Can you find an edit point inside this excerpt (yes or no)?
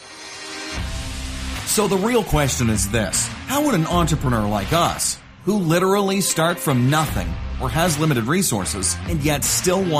yes